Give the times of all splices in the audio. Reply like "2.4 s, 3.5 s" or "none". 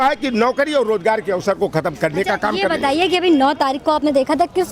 none